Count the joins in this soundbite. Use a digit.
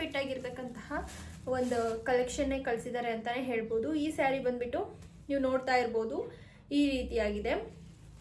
0